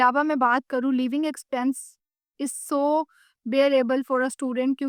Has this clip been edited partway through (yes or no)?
no